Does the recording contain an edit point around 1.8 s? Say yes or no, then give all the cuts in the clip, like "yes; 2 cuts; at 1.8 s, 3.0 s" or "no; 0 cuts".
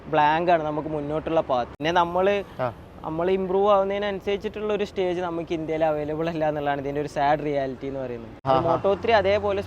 yes; 2 cuts; at 1.8 s, 8.4 s